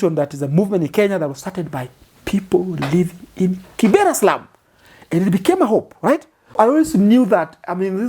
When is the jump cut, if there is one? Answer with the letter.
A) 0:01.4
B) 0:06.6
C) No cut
B